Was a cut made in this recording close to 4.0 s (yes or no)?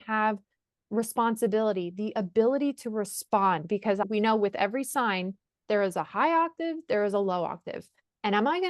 yes